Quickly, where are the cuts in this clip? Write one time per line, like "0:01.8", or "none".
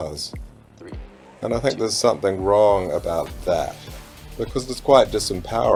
none